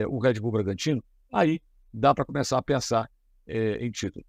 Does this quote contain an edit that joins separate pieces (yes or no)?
no